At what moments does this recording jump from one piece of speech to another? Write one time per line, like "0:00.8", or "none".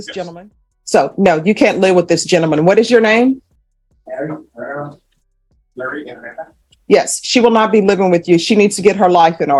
none